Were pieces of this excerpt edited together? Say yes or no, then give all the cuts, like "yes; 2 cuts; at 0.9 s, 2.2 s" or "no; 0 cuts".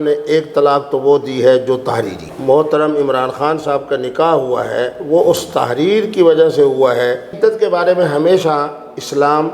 yes; 2 cuts; at 2.2 s, 7.3 s